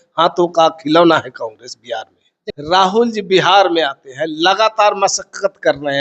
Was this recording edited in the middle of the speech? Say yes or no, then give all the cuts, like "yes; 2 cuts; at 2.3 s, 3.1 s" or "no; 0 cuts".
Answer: yes; 1 cut; at 2.4 s